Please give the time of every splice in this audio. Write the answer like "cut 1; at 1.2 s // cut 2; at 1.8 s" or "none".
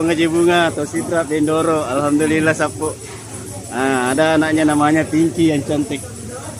none